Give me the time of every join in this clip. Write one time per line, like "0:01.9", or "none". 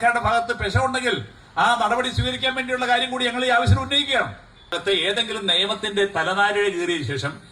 0:04.7